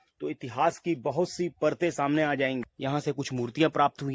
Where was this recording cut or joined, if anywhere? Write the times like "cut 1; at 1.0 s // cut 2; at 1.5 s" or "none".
cut 1; at 2.7 s